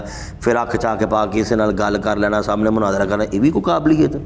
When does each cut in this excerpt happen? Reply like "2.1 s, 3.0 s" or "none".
none